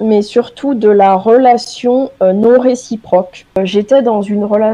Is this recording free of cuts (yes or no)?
no